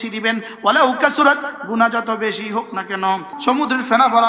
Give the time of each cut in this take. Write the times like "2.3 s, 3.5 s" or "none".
3.3 s